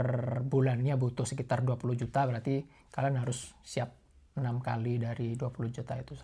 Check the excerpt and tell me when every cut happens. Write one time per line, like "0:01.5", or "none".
none